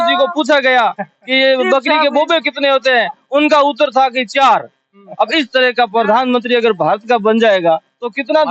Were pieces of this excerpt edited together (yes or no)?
no